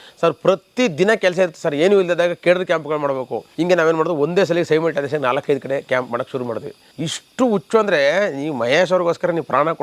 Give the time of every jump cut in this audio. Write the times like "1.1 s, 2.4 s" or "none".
3.4 s, 6.8 s